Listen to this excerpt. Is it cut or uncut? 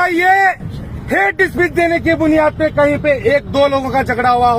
uncut